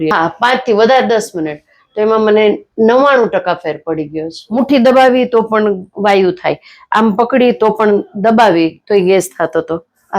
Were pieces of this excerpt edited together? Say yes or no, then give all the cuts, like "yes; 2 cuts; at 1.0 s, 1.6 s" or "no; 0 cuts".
yes; 1 cut; at 4.4 s